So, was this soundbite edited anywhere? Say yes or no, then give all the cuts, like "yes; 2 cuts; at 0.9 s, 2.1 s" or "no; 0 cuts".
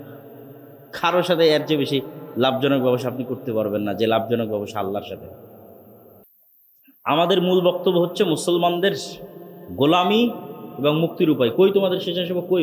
yes; 1 cut; at 6.2 s